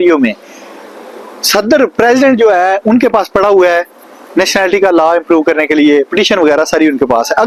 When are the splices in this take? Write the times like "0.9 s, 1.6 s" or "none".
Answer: none